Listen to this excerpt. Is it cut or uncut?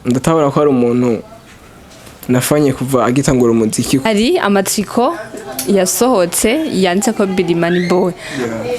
cut